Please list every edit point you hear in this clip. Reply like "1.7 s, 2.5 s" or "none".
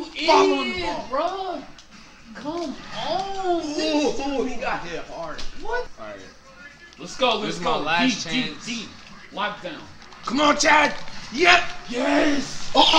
5.9 s